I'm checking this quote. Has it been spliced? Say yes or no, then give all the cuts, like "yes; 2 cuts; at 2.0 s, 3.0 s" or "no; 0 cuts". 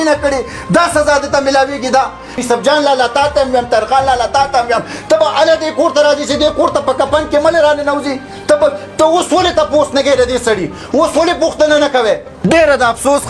yes; 2 cuts; at 2.4 s, 12.5 s